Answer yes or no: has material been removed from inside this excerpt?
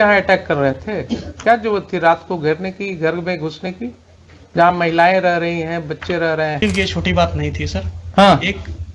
yes